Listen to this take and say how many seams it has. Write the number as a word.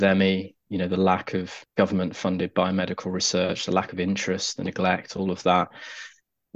one